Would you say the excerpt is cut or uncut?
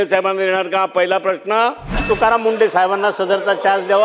cut